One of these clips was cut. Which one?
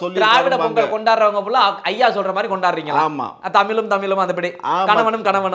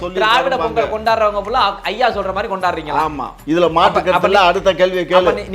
second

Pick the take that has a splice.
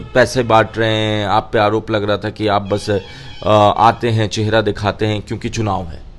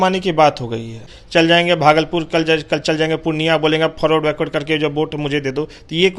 second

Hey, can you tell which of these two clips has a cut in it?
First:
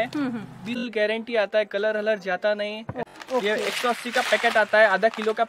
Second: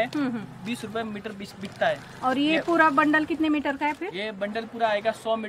first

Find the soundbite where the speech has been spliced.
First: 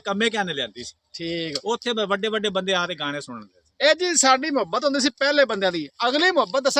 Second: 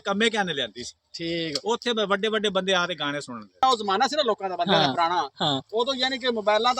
second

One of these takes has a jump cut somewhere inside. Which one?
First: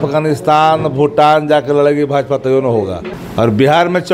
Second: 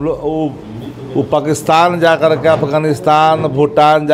first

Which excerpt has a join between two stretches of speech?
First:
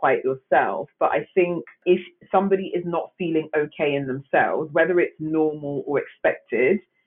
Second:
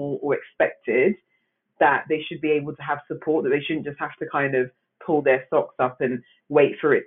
first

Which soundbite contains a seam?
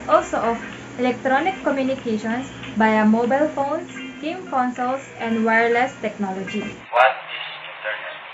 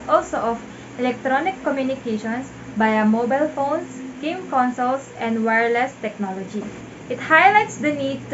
first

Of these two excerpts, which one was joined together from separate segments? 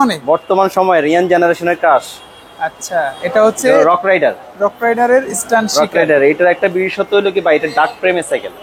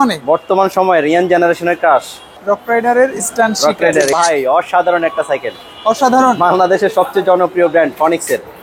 second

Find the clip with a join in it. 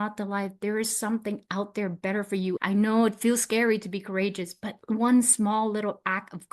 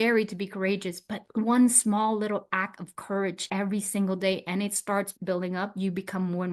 first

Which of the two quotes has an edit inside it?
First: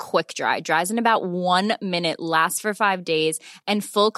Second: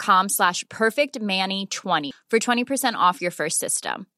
second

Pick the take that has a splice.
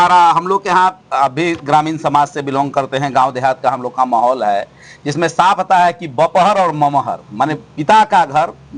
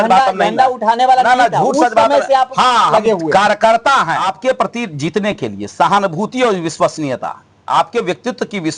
second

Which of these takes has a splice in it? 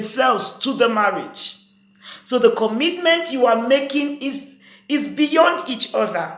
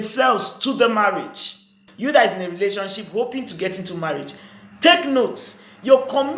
second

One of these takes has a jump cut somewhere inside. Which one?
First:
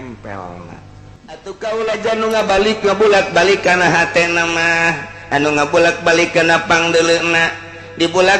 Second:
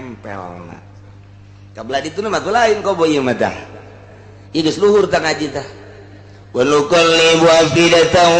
first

